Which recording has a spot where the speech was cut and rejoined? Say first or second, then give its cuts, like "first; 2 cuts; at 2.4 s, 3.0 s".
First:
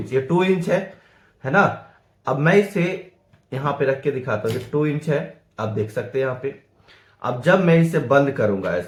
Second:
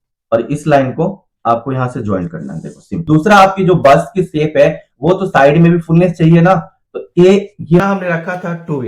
second; 2 cuts; at 2.9 s, 7.8 s